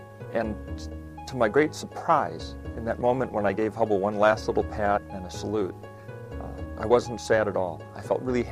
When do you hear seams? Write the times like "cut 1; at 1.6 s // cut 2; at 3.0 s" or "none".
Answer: cut 1; at 5.3 s